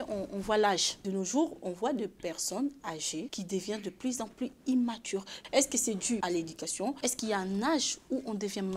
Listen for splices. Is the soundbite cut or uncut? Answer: cut